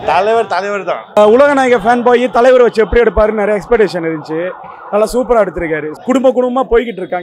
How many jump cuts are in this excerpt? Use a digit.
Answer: 2